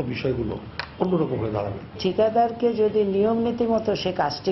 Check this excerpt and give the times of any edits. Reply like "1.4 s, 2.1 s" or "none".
2.0 s